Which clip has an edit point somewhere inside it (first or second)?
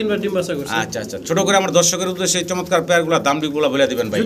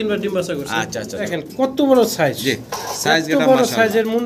second